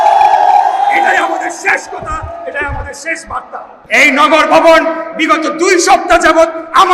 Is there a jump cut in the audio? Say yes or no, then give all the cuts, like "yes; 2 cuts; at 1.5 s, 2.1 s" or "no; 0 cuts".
yes; 1 cut; at 3.7 s